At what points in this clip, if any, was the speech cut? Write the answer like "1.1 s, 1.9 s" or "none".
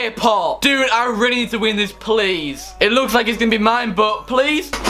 2.7 s